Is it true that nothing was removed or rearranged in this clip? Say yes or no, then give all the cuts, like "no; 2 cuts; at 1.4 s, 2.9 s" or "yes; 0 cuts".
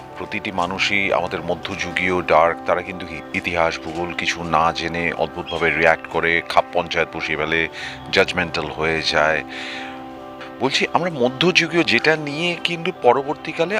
no; 1 cut; at 10.4 s